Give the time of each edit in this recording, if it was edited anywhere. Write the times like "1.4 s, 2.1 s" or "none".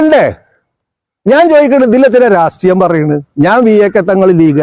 none